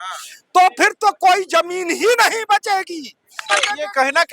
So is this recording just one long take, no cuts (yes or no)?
no